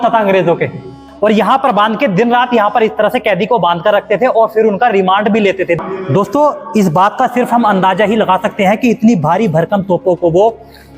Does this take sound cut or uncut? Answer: cut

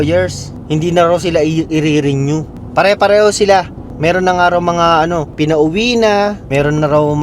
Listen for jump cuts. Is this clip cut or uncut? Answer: cut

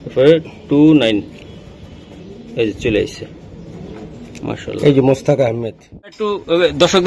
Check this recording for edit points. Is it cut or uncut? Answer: cut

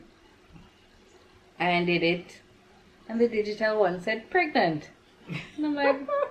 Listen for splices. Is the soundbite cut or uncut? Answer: uncut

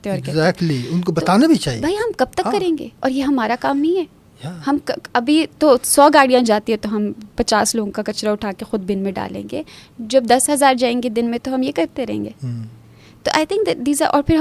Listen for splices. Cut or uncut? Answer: uncut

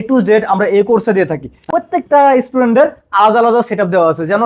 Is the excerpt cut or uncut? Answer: cut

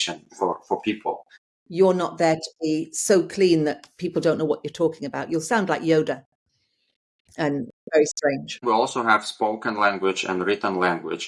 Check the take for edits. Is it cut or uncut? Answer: cut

